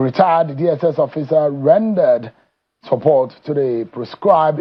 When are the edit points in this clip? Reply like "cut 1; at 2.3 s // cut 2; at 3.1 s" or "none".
none